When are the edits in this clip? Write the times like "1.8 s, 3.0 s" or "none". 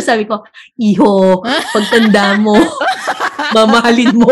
none